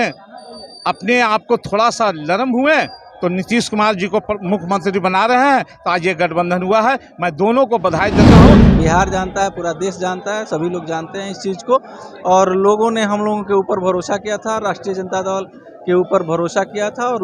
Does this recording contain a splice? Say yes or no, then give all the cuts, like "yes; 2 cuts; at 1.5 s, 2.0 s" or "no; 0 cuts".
yes; 2 cuts; at 8.1 s, 8.8 s